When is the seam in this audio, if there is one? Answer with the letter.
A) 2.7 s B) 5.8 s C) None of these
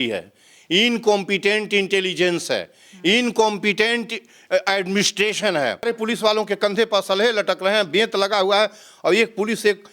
B